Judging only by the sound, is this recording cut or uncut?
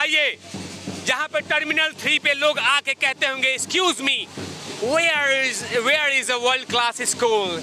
uncut